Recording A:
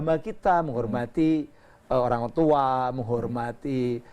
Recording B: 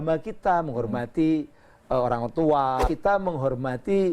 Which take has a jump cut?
B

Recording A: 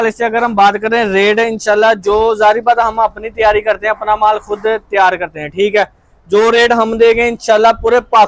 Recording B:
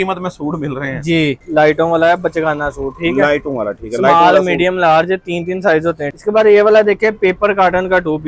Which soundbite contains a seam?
B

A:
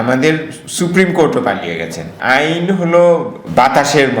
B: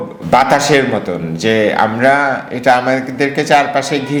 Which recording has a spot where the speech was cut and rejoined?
A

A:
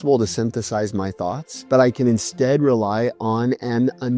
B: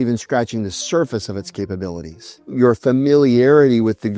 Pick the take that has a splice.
B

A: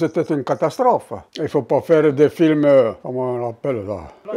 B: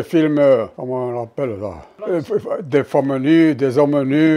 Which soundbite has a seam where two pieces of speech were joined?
A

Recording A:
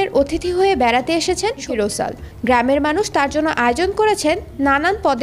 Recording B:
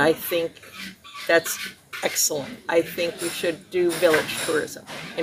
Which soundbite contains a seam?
A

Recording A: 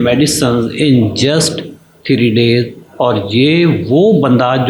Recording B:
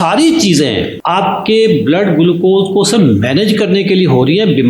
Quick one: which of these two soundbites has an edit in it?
B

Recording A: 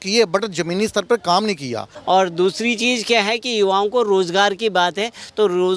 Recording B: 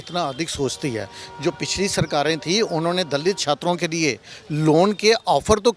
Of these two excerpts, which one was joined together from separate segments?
A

